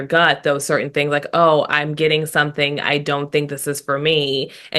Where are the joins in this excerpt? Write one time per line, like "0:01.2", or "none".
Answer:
none